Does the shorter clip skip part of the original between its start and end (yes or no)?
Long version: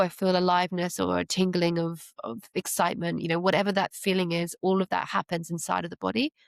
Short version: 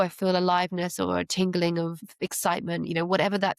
yes